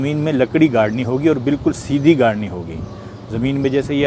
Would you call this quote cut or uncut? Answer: uncut